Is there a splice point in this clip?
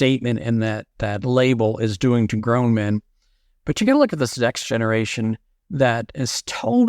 yes; 1 cut; at 0.9 s

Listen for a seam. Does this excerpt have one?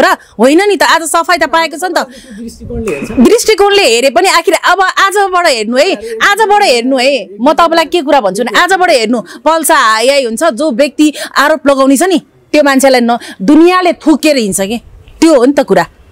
no; 0 cuts

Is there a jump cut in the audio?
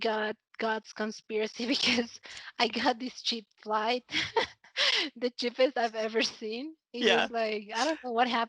no; 0 cuts

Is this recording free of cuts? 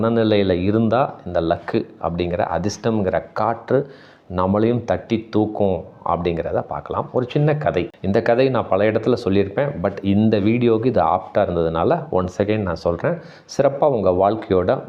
yes; 0 cuts

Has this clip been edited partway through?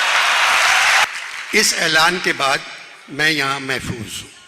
yes; 1 cut; at 1.0 s

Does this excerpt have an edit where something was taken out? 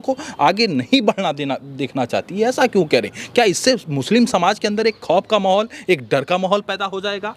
no; 0 cuts

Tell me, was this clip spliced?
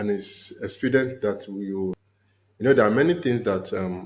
yes; 1 cut; at 2.0 s

